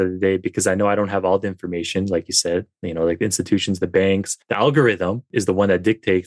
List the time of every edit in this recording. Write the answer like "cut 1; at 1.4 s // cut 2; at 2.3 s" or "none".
cut 1; at 4.4 s // cut 2; at 5.2 s